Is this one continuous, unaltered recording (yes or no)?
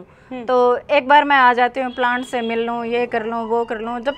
yes